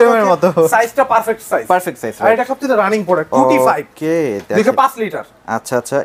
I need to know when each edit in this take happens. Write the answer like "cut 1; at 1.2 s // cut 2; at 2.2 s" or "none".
none